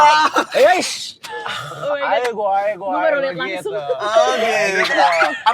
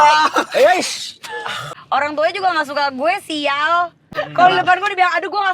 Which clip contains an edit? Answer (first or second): second